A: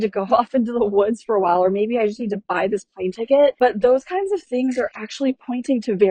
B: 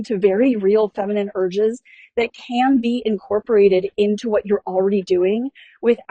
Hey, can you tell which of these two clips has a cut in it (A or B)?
A